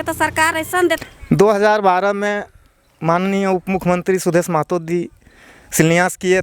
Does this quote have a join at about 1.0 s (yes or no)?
yes